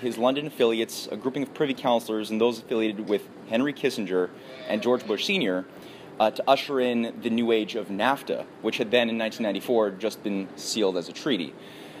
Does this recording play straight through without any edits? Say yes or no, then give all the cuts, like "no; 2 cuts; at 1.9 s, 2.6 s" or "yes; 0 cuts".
no; 1 cut; at 3.4 s